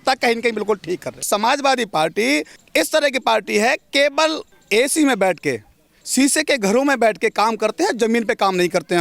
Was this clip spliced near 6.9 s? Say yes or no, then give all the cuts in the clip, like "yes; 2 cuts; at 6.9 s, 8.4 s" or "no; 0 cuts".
no; 3 cuts; at 1.2 s, 2.6 s, 4.5 s